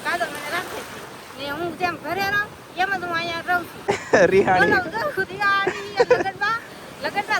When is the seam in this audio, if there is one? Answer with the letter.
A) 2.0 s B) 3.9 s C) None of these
B